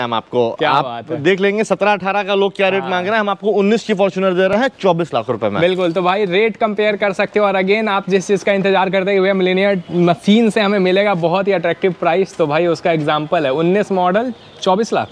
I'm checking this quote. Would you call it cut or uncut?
uncut